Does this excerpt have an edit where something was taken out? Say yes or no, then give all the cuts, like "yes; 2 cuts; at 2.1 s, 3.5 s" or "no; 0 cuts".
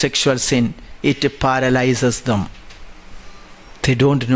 no; 0 cuts